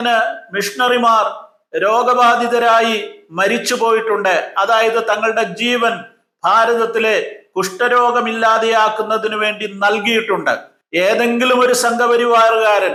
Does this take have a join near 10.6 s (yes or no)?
no